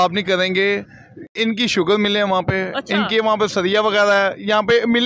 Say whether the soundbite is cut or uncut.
cut